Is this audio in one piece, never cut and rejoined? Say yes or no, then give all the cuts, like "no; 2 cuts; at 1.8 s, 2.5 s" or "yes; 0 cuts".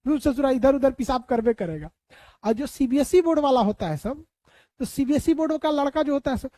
yes; 0 cuts